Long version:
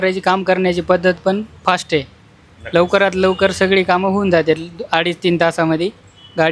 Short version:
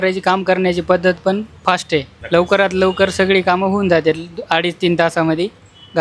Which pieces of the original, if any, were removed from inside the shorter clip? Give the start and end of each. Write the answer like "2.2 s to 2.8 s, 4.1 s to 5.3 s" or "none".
2.1 s to 2.6 s